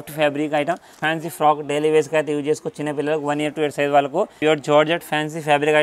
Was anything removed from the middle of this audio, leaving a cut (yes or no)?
yes